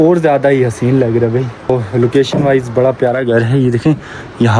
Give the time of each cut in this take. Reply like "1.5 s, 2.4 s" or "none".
1.7 s